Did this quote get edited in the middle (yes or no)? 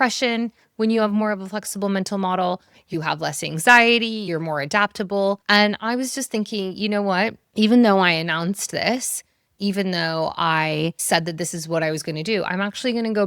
yes